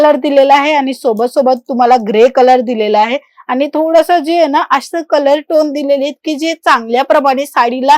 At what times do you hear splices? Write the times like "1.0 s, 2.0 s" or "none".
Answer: none